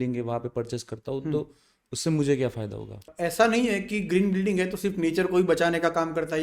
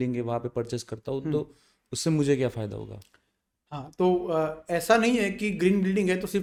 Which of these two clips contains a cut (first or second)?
first